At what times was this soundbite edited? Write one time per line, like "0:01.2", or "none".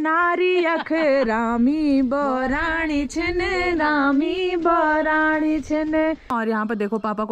0:06.3